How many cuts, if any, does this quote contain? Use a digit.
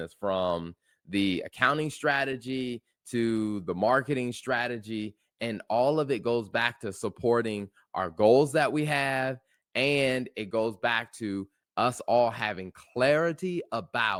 0